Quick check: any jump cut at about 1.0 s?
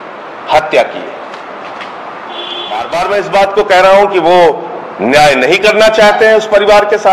no; 1 cut; at 2.8 s

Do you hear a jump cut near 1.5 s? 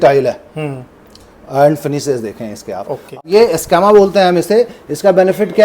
no; 1 cut; at 3.2 s

